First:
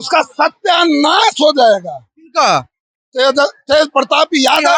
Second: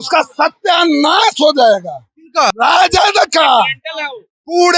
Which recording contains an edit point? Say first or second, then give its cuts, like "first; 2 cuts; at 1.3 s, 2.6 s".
second; 1 cut; at 2.5 s